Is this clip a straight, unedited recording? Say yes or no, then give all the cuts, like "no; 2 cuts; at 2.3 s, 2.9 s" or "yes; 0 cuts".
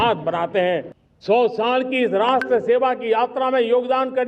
no; 1 cut; at 1.0 s